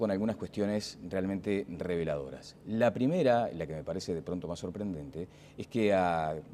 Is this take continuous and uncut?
no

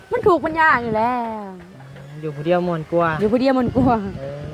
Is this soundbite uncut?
yes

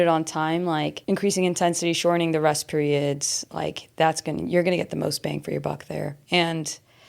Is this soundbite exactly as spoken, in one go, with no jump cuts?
no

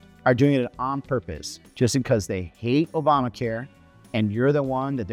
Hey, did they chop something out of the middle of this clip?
no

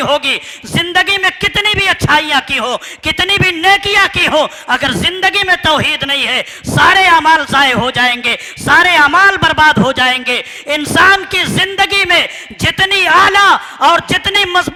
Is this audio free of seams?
yes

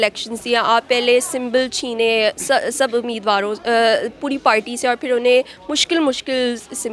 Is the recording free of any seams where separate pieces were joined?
yes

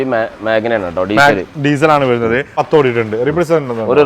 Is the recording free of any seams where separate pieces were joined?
no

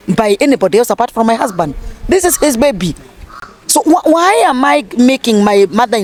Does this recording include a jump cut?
no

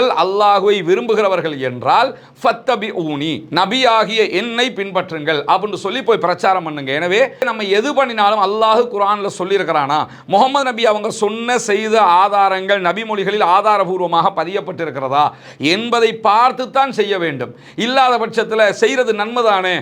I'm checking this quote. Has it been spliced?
no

